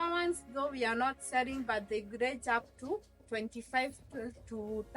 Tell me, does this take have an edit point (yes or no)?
no